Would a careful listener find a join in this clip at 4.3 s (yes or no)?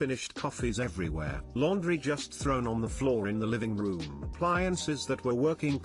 yes